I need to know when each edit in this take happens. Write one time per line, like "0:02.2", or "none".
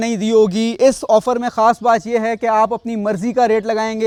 none

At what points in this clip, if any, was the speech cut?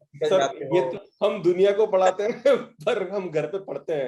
0:00.9

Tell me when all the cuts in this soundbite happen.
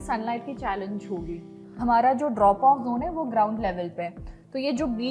0:01.7

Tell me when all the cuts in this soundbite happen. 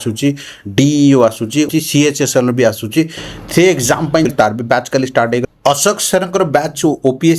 0:01.7
0:04.3

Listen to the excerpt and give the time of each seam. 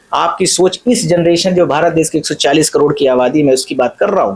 none

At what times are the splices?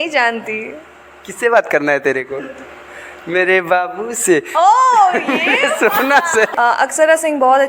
0:06.5

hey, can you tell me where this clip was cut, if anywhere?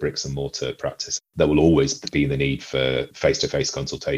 0:01.3
0:03.1

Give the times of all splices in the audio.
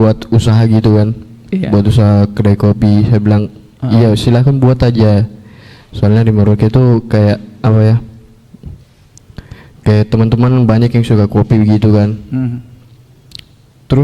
none

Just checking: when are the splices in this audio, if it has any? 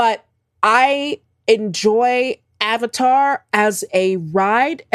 none

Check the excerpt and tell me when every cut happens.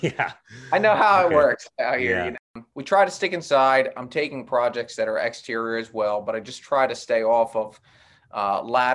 0:02.7

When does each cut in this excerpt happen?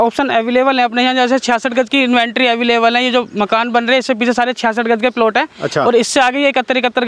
none

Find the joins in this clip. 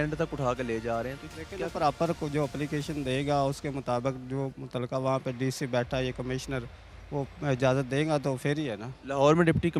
none

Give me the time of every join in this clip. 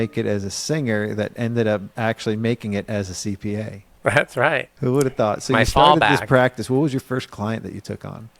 none

